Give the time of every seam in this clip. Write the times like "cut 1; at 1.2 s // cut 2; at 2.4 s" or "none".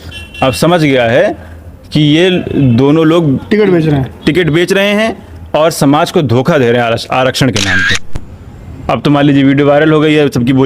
cut 1; at 8.1 s